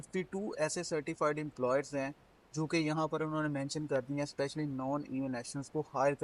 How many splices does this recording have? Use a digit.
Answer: 0